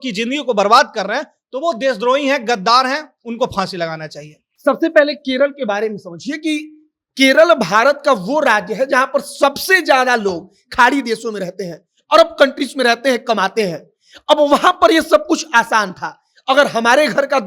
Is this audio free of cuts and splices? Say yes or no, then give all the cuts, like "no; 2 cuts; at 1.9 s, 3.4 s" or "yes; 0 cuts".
yes; 0 cuts